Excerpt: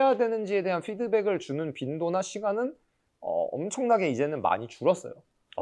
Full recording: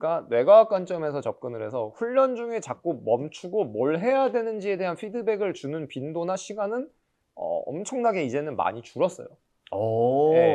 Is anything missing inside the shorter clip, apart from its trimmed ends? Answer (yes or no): no